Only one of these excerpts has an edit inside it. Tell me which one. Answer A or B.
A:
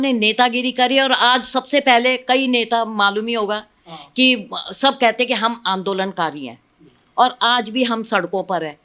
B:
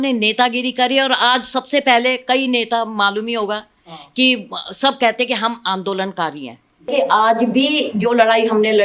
B